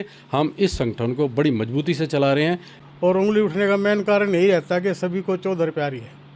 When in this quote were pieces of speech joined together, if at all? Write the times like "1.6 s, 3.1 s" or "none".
2.7 s